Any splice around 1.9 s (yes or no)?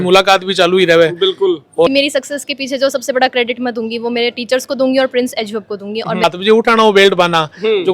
yes